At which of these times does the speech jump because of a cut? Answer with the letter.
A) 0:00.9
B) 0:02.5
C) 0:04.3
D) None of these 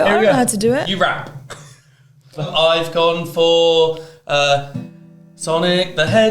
B